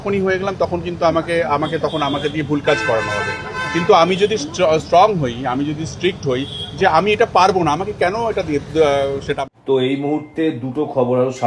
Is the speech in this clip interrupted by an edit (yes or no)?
yes